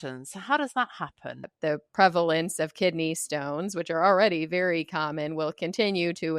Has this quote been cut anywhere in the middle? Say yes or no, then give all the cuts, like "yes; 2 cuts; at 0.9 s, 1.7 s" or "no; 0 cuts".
yes; 1 cut; at 1.5 s